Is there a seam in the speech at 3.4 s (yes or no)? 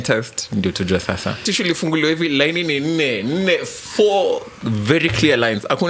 no